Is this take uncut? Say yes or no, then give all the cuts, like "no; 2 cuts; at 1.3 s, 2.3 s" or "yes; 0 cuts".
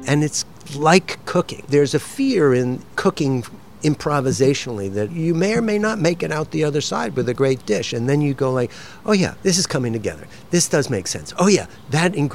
no; 3 cuts; at 2.8 s, 5.1 s, 9.4 s